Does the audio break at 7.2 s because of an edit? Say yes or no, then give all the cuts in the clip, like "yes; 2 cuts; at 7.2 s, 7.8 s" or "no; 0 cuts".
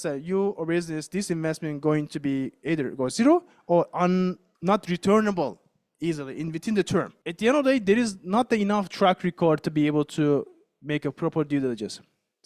yes; 2 cuts; at 4.5 s, 7.2 s